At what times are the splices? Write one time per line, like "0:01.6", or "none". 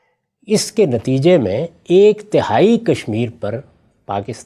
none